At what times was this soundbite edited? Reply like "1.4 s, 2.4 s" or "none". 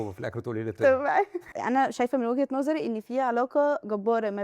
1.6 s